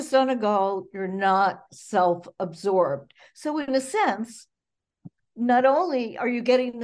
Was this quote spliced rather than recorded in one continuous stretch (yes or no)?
no